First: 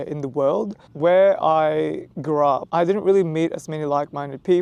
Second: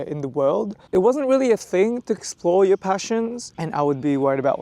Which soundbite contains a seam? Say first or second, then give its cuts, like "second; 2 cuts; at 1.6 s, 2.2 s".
second; 2 cuts; at 0.8 s, 3.6 s